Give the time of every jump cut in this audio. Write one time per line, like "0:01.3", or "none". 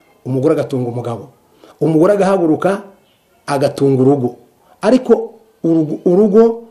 none